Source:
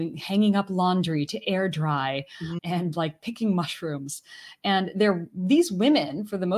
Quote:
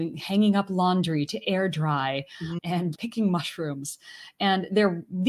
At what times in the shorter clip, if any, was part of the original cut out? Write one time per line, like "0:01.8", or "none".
0:02.9